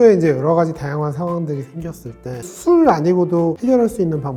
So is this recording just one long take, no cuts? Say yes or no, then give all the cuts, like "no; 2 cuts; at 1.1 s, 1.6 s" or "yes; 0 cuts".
yes; 0 cuts